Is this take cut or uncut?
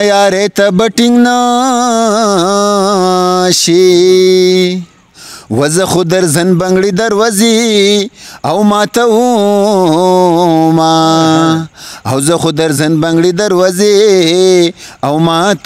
uncut